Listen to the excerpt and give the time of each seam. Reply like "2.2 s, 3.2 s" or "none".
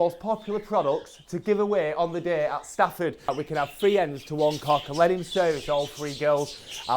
3.3 s